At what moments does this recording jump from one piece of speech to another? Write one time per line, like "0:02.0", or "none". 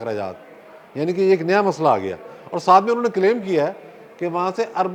none